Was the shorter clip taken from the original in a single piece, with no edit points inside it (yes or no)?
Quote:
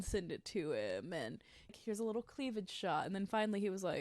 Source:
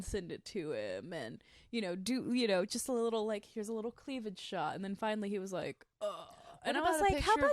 no